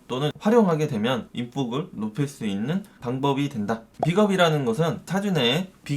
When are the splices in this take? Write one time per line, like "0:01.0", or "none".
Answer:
0:01.3
0:02.9
0:03.9